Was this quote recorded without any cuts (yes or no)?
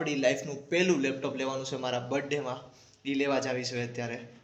yes